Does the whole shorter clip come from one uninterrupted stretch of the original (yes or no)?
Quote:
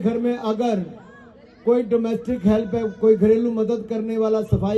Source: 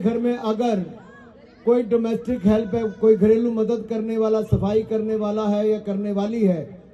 yes